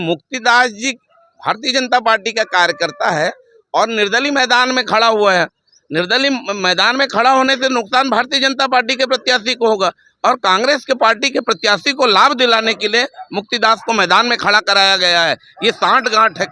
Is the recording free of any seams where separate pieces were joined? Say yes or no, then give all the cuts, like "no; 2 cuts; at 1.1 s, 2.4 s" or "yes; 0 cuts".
no; 1 cut; at 11.2 s